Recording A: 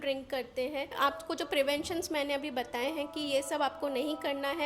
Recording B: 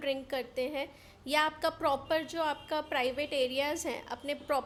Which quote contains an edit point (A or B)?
A